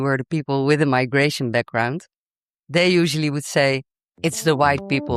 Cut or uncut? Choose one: uncut